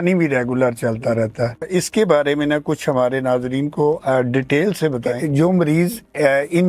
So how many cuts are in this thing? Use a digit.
2